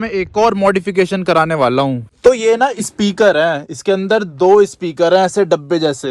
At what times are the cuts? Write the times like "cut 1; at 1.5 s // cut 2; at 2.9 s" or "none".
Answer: cut 1; at 2.1 s

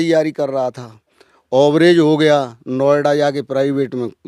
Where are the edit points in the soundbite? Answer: none

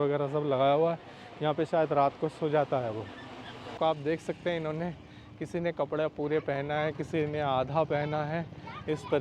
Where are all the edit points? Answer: cut 1; at 3.8 s

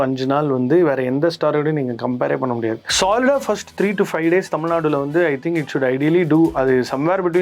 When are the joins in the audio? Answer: cut 1; at 2.8 s

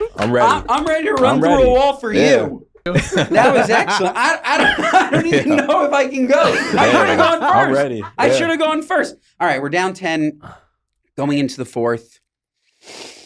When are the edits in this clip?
cut 1; at 2.8 s

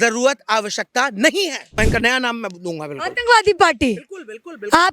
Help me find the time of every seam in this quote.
cut 1; at 1.8 s

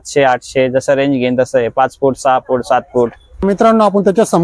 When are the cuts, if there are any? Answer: none

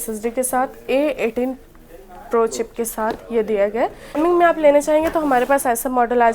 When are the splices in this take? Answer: cut 1; at 4.2 s

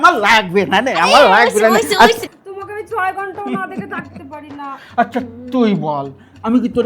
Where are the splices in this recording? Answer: cut 1; at 2.2 s

